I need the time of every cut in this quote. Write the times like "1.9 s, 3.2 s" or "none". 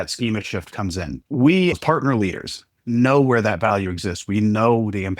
1.2 s, 1.8 s